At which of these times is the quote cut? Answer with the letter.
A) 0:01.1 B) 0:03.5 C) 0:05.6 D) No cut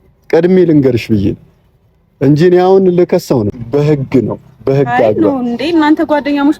B